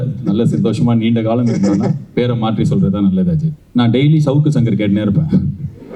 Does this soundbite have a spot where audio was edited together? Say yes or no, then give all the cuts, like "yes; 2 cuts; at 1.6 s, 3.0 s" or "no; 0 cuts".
yes; 1 cut; at 3.6 s